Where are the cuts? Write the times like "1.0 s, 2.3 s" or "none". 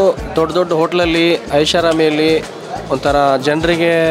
none